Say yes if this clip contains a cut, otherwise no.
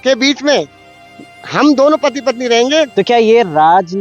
yes